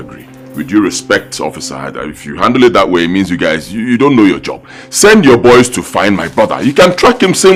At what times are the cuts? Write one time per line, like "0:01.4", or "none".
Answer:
none

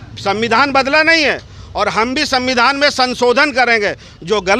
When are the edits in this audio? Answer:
none

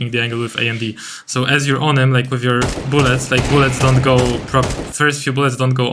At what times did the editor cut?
none

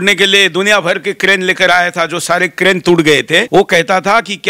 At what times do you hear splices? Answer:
0:03.5

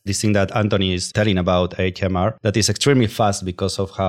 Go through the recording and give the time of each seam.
0:01.0
0:02.4

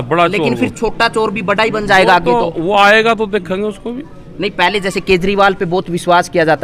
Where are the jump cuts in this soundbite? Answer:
none

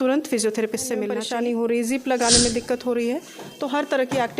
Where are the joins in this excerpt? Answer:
0:01.2

